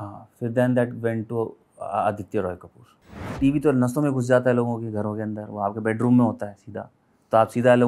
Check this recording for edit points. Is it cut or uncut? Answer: cut